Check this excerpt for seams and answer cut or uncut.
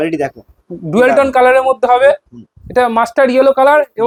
uncut